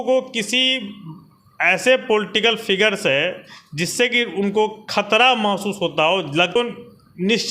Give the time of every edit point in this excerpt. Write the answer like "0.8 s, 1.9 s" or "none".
6.6 s